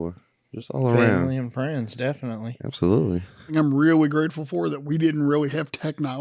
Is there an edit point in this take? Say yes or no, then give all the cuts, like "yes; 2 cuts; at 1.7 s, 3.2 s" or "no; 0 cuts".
yes; 1 cut; at 3.5 s